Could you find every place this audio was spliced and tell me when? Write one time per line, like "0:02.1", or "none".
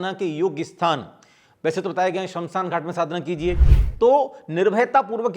0:03.8